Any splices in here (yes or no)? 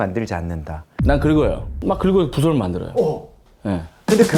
yes